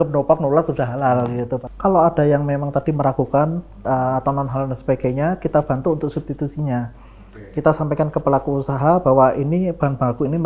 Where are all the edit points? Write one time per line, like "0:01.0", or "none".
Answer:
0:01.6